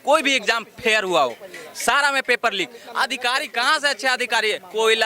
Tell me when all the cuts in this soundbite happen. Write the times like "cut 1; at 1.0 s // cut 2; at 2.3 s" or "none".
none